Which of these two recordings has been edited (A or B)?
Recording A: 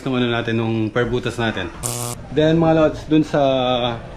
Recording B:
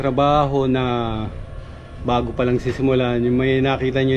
A